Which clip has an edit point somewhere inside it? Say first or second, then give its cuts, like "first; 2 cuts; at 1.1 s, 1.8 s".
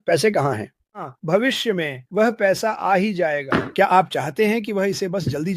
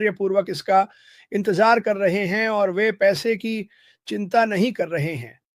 first; 1 cut; at 1.1 s